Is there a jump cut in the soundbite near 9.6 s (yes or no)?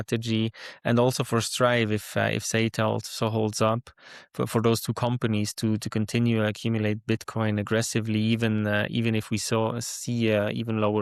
no